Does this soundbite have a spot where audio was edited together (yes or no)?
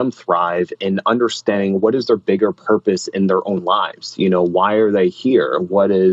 no